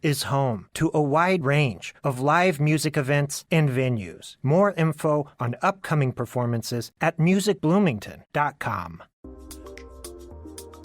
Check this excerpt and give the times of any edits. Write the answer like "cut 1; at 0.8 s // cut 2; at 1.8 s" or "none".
cut 1; at 9.2 s

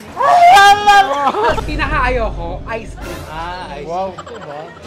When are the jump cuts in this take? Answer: cut 1; at 1.6 s

